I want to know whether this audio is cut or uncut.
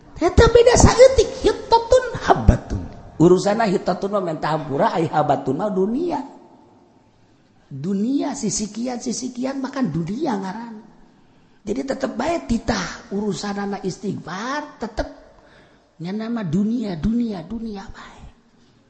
uncut